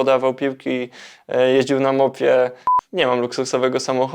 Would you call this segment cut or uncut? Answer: cut